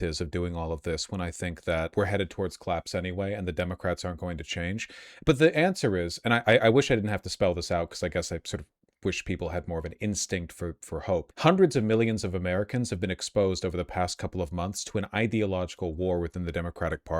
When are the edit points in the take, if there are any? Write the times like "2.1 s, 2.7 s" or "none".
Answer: 1.9 s, 11.3 s